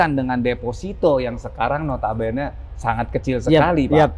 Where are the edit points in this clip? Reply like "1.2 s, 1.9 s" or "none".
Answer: none